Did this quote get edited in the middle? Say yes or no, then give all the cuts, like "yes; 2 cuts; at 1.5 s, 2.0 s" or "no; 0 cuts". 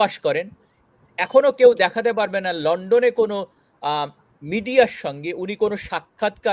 no; 0 cuts